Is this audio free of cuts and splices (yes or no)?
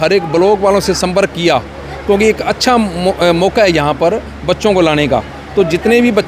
yes